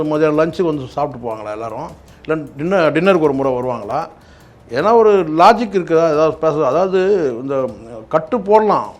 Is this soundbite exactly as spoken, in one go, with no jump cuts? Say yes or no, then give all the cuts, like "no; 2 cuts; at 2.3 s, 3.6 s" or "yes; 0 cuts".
yes; 0 cuts